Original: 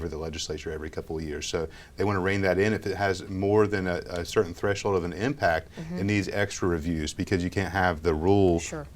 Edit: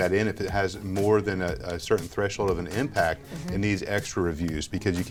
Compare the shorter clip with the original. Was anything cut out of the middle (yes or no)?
no